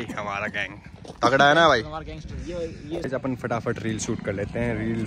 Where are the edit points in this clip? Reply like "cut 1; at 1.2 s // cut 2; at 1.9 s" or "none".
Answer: cut 1; at 3.0 s